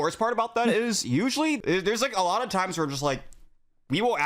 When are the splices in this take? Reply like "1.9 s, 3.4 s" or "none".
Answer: 1.6 s